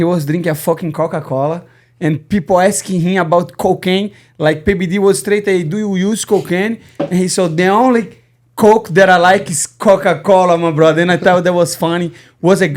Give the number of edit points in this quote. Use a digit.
0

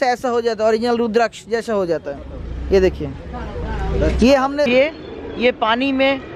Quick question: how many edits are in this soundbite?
1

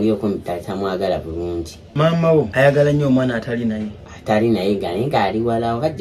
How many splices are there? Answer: 2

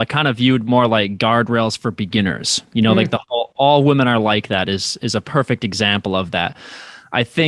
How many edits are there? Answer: 0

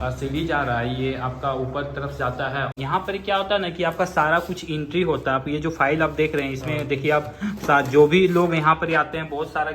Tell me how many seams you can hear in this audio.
1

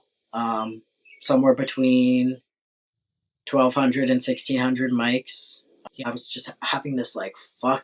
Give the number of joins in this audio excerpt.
1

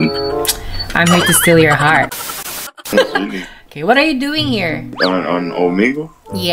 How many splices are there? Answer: 1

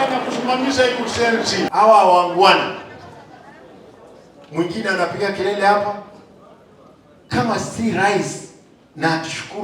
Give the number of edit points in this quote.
1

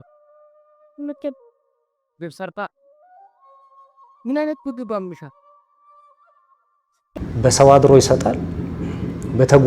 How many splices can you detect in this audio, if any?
1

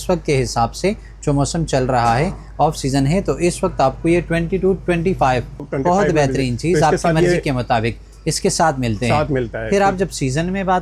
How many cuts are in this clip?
1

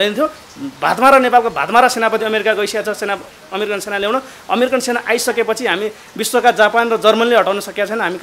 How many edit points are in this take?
0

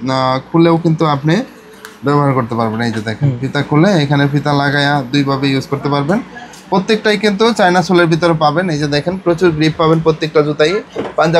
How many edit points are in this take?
0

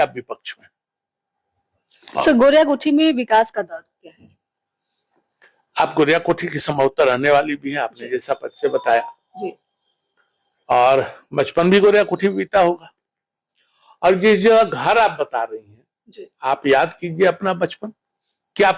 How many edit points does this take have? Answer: 0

